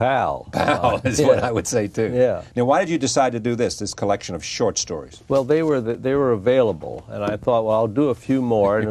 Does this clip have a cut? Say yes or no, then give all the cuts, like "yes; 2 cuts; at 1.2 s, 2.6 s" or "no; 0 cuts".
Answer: no; 0 cuts